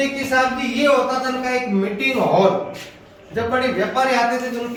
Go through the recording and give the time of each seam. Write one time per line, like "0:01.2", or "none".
none